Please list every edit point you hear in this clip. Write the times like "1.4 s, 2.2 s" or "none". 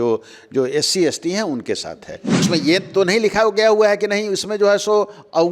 2.5 s